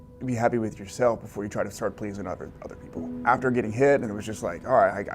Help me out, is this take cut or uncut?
cut